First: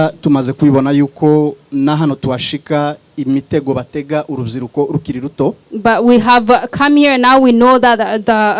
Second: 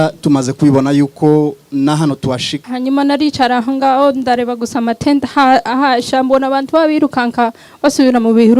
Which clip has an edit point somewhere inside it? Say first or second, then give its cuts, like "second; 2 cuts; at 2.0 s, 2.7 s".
second; 1 cut; at 2.5 s